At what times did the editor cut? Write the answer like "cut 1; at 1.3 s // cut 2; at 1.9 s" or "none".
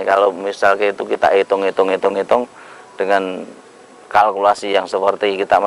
none